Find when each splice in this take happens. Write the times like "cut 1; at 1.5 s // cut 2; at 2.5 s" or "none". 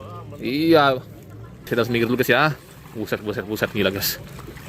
cut 1; at 1.7 s